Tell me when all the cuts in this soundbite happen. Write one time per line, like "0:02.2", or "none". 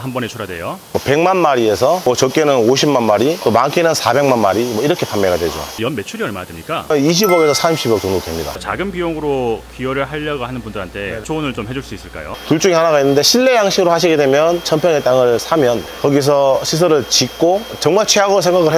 0:00.9
0:05.8
0:06.9
0:08.6
0:12.3
0:17.7